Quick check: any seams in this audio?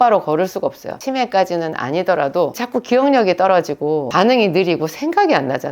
yes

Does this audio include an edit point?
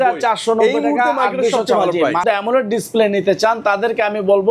yes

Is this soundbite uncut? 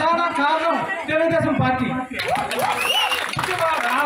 yes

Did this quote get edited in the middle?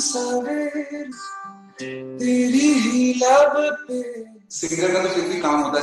yes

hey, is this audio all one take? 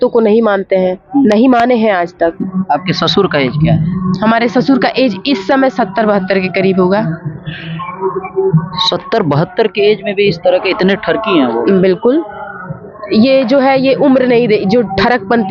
no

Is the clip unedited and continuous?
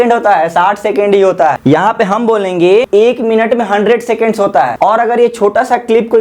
no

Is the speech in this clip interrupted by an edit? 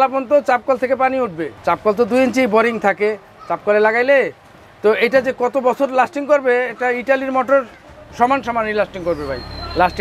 no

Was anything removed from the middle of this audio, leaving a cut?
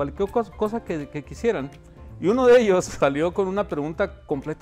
yes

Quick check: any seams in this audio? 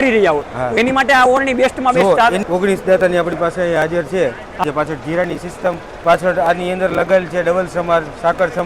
yes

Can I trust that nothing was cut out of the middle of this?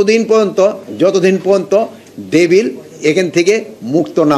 yes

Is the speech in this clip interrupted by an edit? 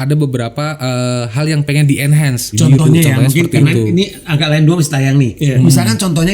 yes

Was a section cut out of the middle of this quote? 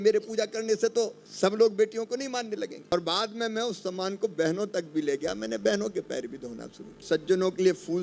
yes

